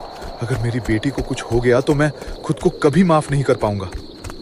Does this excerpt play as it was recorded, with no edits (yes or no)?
yes